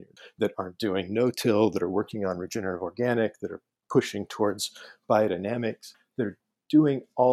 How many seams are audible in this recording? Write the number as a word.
zero